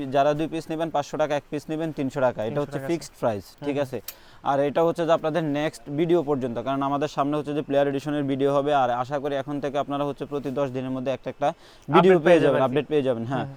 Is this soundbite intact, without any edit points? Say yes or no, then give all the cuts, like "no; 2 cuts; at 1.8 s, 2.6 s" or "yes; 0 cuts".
yes; 0 cuts